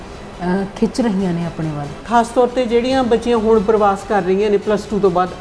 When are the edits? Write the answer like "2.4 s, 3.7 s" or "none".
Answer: 2.0 s